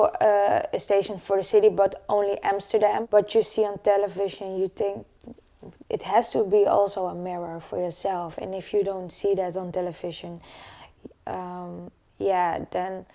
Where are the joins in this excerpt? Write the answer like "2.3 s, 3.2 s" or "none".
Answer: 3.0 s